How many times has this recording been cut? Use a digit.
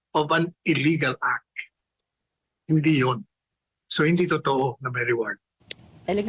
0